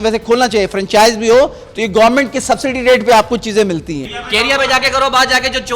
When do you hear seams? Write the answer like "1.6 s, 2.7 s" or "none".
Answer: 4.1 s